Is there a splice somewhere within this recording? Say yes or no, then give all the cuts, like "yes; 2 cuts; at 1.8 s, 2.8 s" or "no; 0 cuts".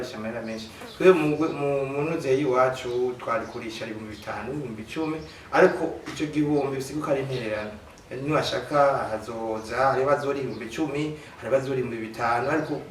no; 0 cuts